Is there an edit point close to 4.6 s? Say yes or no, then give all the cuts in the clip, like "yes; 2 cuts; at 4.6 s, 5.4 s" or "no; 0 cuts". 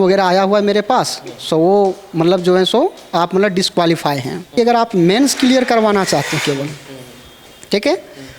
yes; 1 cut; at 4.6 s